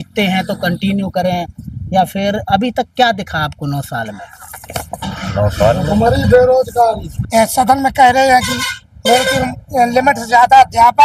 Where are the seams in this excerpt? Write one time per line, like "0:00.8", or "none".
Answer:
0:07.1